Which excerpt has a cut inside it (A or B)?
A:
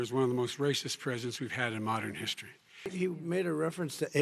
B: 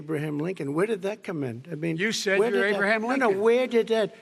A